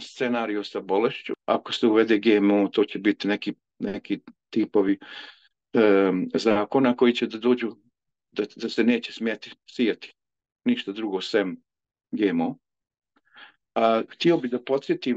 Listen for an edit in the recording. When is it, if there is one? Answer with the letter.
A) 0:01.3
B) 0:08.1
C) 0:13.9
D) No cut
A